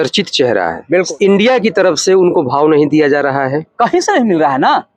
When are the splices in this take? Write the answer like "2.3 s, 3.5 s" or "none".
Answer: 1.1 s